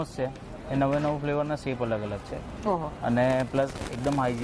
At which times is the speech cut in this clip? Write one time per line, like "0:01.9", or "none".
none